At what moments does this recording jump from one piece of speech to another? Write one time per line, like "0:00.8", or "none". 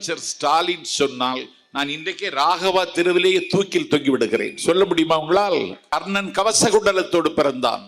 0:05.8